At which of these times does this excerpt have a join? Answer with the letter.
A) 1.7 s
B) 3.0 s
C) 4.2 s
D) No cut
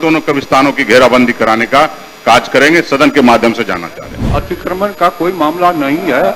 C